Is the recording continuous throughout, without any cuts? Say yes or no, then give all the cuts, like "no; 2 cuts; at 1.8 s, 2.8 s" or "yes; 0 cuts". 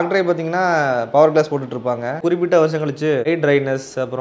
no; 1 cut; at 2.2 s